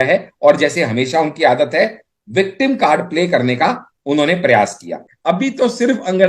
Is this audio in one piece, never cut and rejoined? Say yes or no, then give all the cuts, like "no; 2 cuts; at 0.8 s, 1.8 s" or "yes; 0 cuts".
no; 1 cut; at 5.3 s